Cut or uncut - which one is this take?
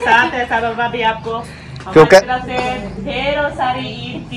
uncut